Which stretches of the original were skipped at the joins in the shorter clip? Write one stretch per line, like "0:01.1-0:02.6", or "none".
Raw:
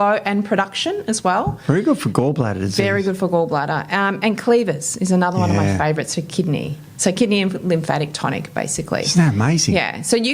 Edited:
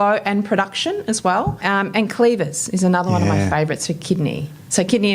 0:01.6-0:03.9